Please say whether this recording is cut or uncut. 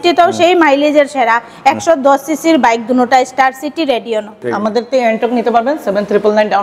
cut